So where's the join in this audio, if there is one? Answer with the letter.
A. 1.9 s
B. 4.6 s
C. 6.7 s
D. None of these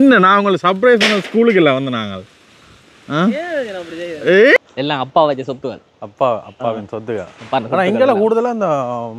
B